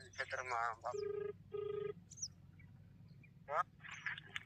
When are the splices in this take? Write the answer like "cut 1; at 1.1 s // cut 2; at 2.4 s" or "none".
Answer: cut 1; at 0.8 s // cut 2; at 2.0 s